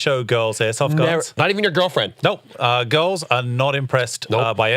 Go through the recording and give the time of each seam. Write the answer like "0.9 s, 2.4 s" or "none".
1.3 s